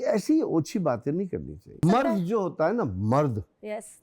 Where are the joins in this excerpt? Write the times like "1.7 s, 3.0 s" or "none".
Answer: 1.8 s